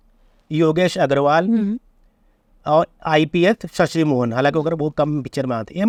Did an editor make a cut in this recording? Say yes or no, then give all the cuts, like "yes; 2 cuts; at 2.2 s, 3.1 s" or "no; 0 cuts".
no; 0 cuts